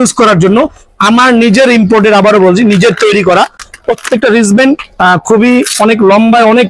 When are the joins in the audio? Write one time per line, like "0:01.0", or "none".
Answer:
none